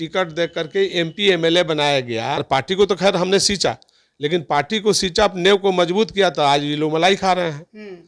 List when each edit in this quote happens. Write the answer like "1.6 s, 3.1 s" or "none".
2.4 s

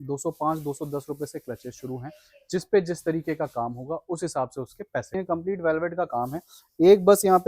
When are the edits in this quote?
5.2 s

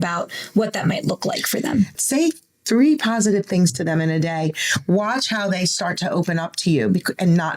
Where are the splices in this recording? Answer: 2.0 s

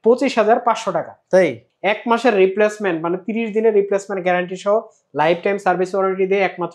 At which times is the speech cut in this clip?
1.7 s

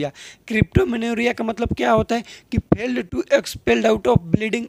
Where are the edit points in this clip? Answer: none

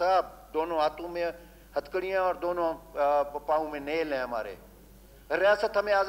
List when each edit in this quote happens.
none

